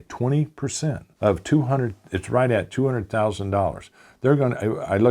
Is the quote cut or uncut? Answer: cut